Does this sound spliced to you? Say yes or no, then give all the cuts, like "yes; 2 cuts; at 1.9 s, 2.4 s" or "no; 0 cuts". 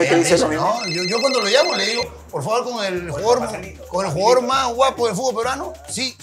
no; 0 cuts